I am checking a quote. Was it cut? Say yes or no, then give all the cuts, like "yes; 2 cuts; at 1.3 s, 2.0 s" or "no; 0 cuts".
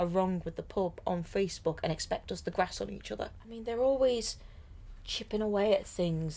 yes; 1 cut; at 3.6 s